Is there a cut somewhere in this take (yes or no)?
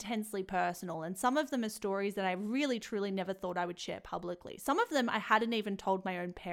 no